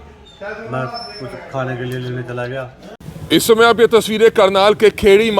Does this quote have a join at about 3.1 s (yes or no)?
yes